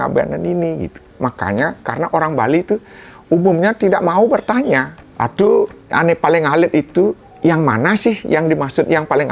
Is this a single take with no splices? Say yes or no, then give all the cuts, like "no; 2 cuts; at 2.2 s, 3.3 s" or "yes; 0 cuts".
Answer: no; 3 cuts; at 1.0 s, 5.0 s, 7.3 s